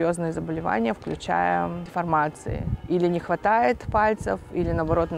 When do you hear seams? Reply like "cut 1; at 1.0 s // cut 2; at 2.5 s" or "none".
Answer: cut 1; at 1.8 s // cut 2; at 2.7 s